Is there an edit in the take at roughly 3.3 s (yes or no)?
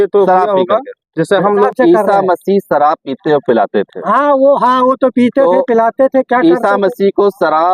no